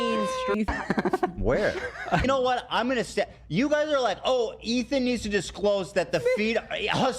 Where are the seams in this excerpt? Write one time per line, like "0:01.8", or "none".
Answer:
0:02.2

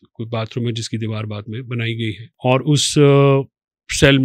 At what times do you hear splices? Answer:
0:02.3

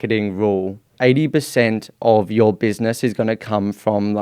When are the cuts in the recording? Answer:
0:00.9

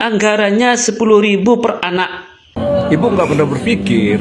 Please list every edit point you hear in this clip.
0:02.5

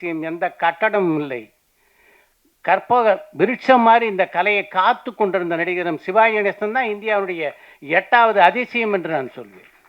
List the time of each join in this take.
none

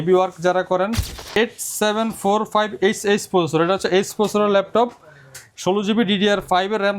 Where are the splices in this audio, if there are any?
0:01.4

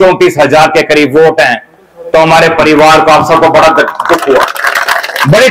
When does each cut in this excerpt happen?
none

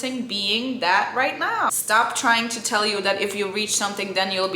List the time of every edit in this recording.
0:01.7

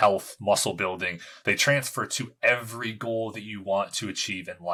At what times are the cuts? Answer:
none

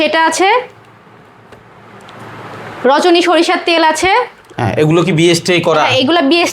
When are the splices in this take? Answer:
none

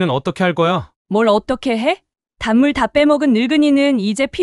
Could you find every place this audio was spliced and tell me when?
0:00.9

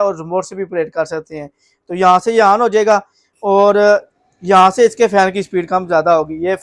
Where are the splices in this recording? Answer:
none

